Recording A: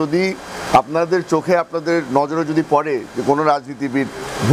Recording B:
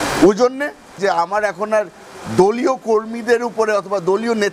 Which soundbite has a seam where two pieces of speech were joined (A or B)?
B